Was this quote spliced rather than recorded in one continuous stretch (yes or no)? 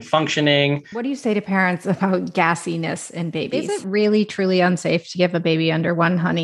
yes